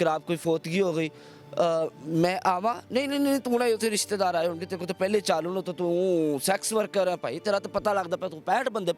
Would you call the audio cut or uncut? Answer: uncut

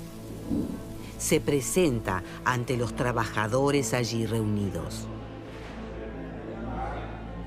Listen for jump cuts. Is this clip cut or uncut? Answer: uncut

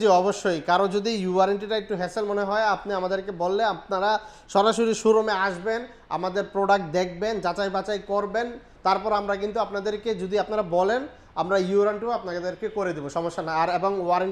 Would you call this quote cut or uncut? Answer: uncut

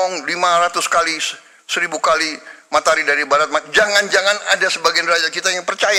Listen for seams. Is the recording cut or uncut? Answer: uncut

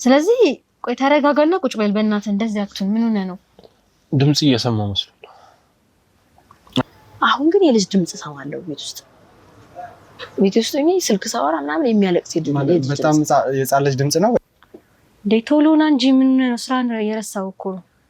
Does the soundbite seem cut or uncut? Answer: cut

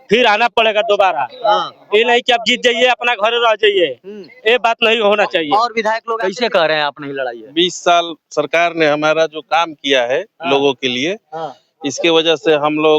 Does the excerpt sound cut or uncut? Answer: cut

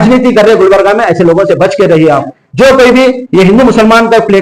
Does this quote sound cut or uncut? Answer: cut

